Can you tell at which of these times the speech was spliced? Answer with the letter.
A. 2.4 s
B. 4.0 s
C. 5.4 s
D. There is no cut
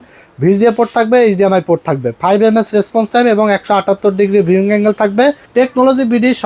C